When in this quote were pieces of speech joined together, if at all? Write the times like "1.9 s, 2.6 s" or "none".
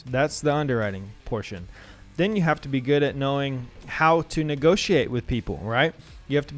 1.2 s